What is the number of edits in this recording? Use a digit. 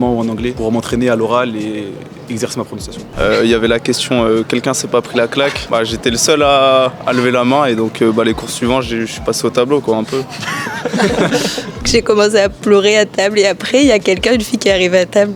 2